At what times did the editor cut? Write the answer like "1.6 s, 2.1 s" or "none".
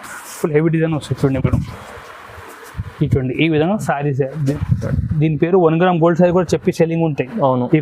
4.5 s